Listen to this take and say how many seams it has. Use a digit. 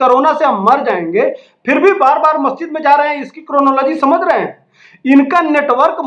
0